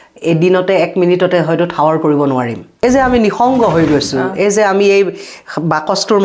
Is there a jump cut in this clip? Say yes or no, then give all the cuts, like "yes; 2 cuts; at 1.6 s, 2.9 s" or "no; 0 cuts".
yes; 1 cut; at 2.6 s